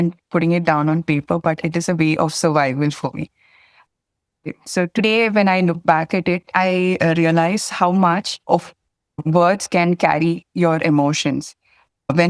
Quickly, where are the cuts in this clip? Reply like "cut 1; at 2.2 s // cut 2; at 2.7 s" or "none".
cut 1; at 4.5 s